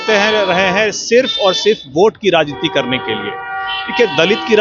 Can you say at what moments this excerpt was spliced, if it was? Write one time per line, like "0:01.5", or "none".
none